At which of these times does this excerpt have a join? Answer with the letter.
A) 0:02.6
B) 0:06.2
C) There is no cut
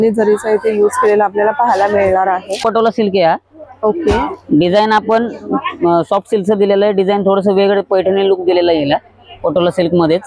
A